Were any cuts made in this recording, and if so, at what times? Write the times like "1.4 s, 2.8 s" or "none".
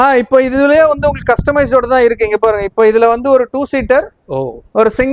none